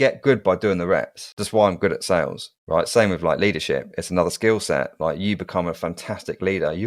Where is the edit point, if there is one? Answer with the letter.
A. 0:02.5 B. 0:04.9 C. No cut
C